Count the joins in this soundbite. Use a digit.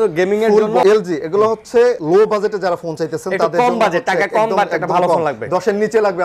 2